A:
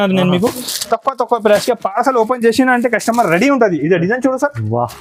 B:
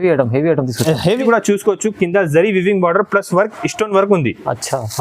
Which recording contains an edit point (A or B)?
B